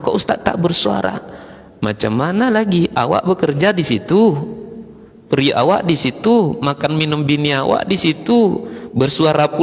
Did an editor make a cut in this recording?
no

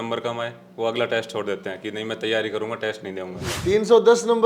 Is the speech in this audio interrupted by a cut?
yes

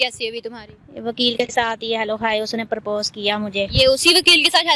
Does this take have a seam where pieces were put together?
no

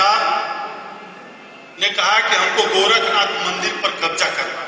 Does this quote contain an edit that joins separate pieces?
no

